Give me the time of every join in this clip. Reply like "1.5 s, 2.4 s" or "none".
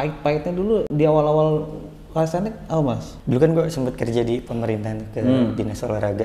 3.1 s